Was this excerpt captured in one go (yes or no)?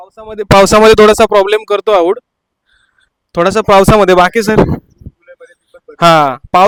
yes